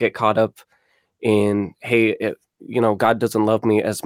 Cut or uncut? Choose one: uncut